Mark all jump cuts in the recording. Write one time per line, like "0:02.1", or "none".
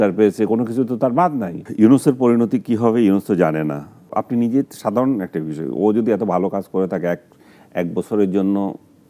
0:01.6
0:04.1